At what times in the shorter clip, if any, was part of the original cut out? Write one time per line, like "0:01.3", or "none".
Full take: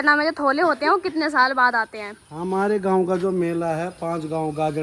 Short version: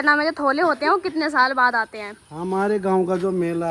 none